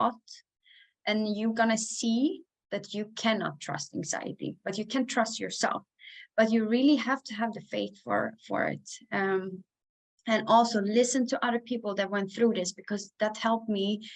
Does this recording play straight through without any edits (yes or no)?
yes